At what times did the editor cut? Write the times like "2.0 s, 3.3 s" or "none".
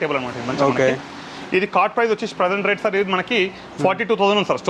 none